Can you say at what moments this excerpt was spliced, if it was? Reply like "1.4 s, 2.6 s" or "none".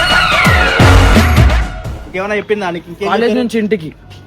1.8 s